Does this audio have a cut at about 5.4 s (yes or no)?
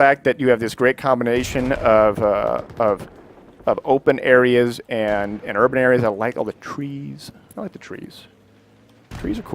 yes